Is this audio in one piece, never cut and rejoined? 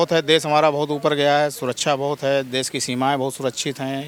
yes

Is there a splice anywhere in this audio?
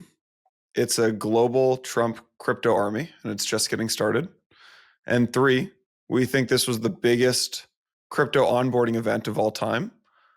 no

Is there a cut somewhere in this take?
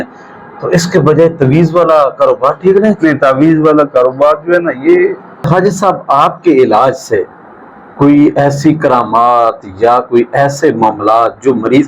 yes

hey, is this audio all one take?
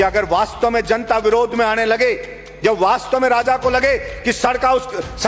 yes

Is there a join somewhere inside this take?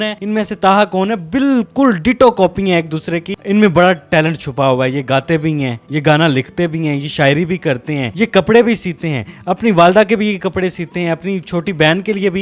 no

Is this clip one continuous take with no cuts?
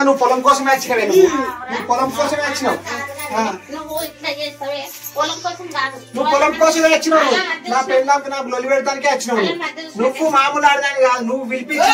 yes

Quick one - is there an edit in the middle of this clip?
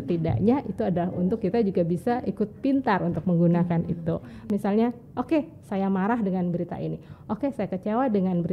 yes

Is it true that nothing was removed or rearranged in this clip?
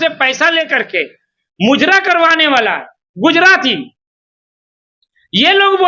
yes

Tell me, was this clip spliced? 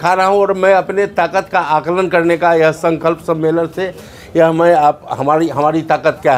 no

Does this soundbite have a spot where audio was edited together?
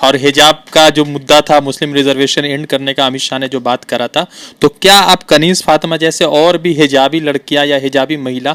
no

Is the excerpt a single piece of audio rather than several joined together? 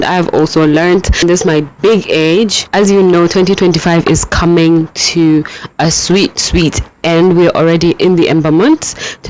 no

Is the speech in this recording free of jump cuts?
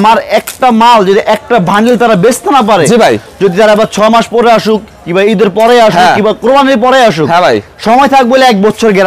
yes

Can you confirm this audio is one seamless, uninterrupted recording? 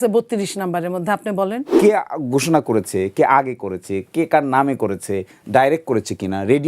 no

